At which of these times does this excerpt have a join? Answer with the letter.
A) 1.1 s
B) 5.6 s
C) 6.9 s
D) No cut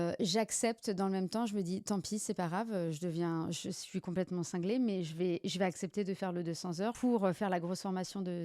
C